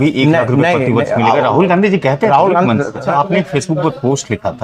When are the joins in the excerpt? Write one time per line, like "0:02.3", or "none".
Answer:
0:03.0